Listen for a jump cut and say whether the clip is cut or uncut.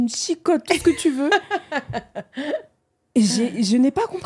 uncut